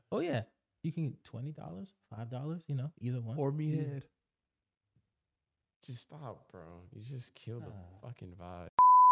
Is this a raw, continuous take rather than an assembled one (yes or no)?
yes